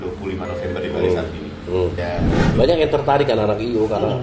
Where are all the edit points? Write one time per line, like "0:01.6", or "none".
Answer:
0:02.0